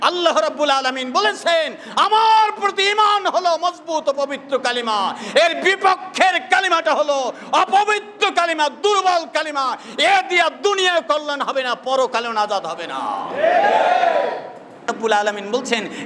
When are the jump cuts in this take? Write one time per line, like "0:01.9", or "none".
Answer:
0:14.9